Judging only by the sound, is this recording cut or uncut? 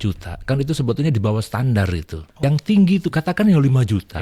cut